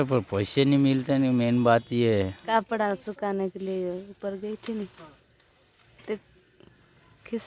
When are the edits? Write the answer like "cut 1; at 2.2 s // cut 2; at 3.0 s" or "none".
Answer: cut 1; at 2.4 s

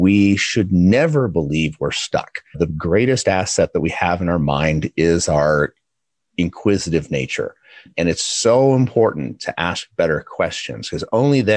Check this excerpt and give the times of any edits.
cut 1; at 2.6 s // cut 2; at 7.9 s

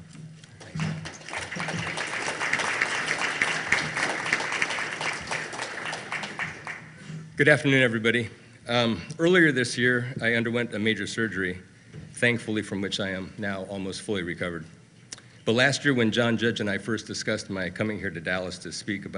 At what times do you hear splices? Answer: cut 1; at 10.8 s

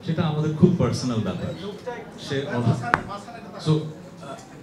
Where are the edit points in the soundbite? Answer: none

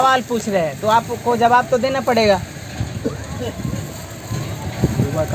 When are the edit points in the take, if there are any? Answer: none

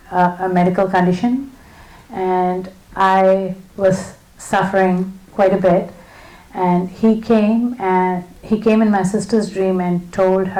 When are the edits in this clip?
none

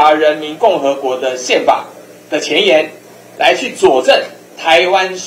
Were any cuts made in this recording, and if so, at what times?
none

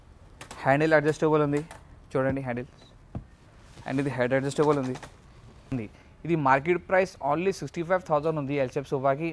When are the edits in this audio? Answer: cut 1; at 5.8 s

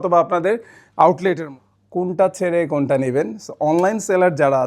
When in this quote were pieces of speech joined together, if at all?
cut 1; at 1.4 s

